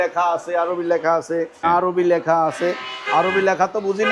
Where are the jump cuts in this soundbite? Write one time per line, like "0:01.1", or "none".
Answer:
0:01.6